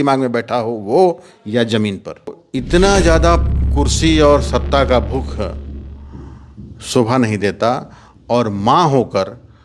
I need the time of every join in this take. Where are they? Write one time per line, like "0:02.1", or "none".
0:02.4